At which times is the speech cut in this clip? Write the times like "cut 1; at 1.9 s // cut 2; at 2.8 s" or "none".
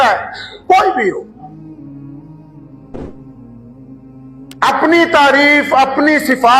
none